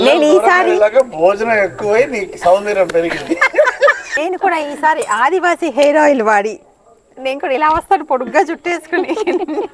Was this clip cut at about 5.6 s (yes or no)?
no